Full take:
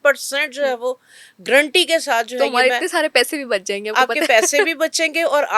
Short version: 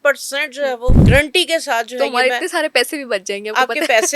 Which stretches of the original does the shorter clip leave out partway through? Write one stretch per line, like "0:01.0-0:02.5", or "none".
0:01.0-0:01.4